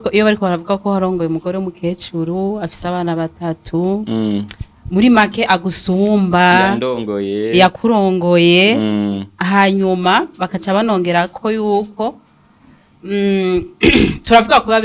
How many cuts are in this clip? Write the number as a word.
zero